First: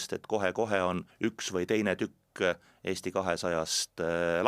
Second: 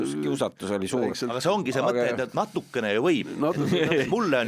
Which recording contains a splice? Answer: first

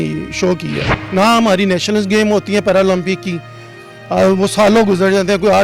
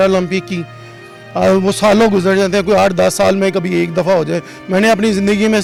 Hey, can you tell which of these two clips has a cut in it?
first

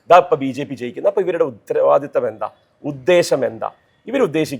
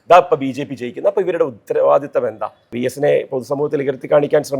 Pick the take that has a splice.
second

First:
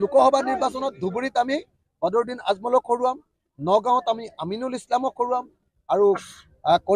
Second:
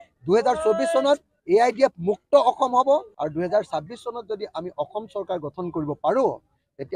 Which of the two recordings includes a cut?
second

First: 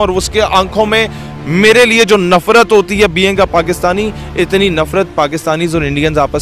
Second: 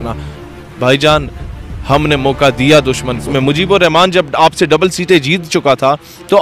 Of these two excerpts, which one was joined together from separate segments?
second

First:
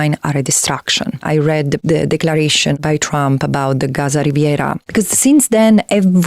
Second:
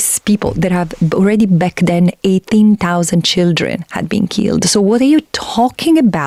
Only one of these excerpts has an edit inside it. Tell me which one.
first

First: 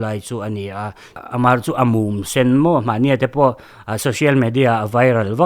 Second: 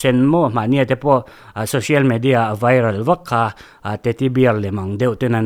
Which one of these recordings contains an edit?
first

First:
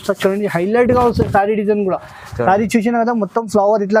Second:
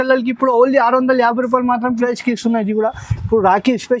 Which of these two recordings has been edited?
second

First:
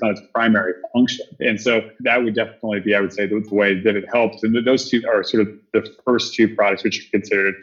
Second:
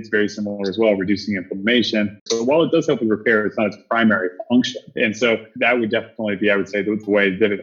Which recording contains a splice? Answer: second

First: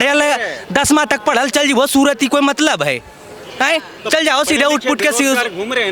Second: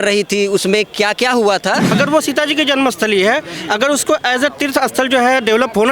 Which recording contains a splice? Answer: second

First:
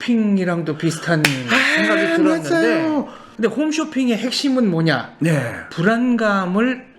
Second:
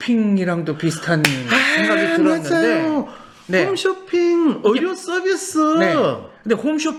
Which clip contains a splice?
first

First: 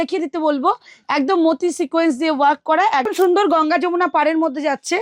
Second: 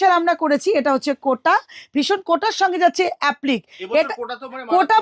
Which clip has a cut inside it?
first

